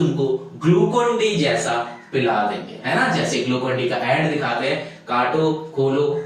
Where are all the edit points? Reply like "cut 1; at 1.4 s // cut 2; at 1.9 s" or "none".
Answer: none